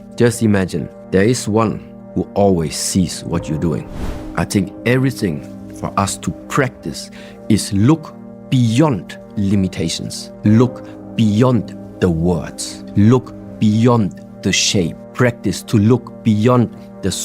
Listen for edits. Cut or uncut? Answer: cut